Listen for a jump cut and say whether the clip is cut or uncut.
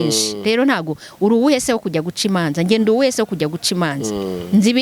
uncut